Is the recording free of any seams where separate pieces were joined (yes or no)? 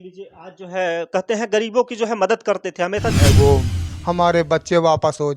no